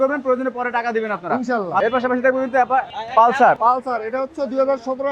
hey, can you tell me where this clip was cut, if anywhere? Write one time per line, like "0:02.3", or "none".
0:01.8
0:03.0
0:03.6